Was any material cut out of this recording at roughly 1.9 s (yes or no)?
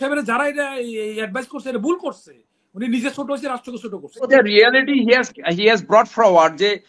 no